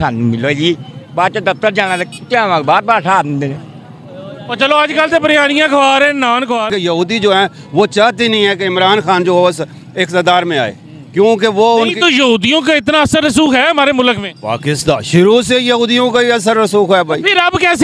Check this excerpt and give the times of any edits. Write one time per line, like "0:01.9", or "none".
0:06.7